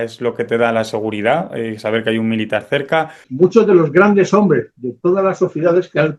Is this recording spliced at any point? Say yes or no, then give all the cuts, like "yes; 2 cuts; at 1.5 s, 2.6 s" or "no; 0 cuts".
yes; 1 cut; at 3.2 s